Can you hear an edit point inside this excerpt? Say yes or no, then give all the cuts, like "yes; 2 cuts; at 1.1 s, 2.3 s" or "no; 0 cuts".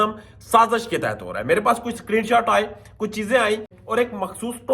yes; 1 cut; at 3.7 s